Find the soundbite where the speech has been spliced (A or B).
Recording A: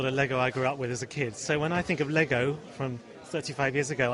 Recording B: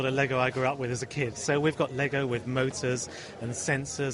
B